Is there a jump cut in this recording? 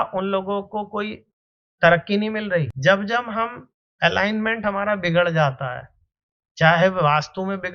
yes; 1 cut; at 2.7 s

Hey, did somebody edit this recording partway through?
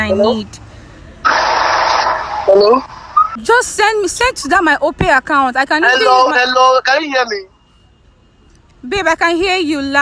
yes; 1 cut; at 3.3 s

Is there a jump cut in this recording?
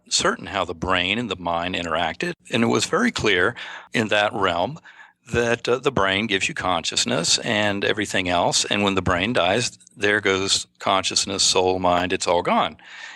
yes; 2 cuts; at 2.3 s, 3.8 s

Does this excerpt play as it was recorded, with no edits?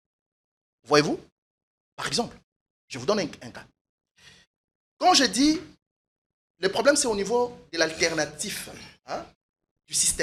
yes; 0 cuts

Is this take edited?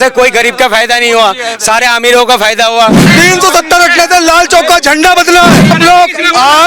yes; 2 cuts; at 3.1 s, 5.7 s

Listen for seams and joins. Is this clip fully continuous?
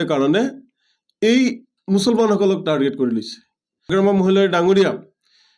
no; 1 cut; at 3.8 s

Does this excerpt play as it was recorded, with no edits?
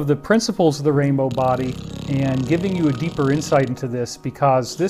yes; 0 cuts

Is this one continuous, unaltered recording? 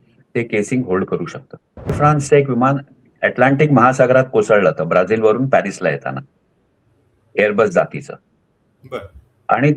no; 1 cut; at 2.0 s

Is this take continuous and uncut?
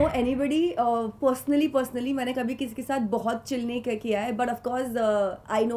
yes; 0 cuts

